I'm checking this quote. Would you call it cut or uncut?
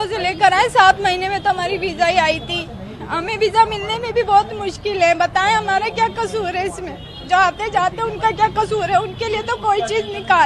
uncut